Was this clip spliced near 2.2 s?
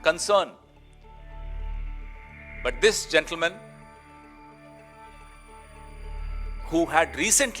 no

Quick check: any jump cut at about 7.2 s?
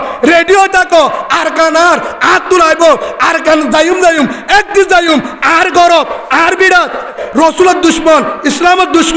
yes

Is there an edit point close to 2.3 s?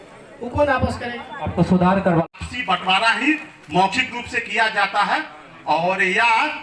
yes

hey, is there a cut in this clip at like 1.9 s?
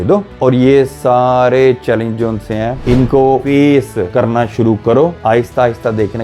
no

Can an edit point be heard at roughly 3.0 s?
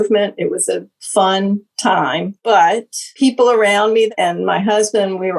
yes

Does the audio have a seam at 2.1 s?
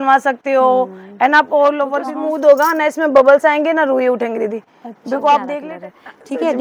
yes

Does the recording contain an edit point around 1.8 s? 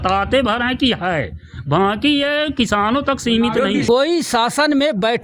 no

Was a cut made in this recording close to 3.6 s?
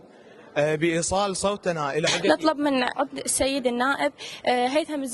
no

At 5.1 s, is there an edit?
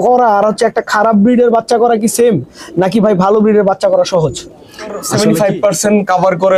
yes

